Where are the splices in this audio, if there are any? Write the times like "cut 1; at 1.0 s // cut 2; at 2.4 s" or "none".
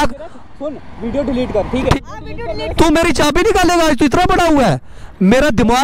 cut 1; at 2.0 s

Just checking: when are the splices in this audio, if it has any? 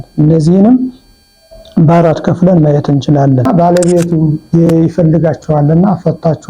cut 1; at 3.5 s

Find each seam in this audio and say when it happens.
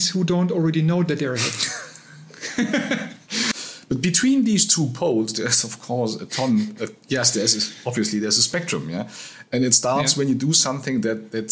cut 1; at 3.5 s

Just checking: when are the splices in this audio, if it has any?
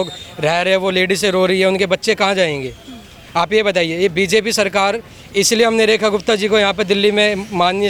none

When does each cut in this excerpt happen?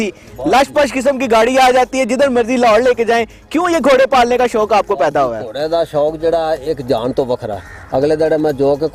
none

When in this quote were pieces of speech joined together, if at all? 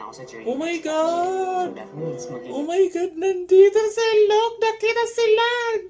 none

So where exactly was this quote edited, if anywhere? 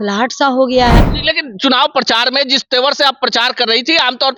cut 1; at 1.0 s

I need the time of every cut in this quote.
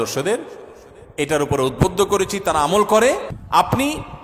cut 1; at 3.3 s

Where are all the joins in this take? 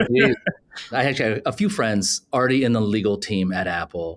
cut 1; at 0.9 s // cut 2; at 2.2 s

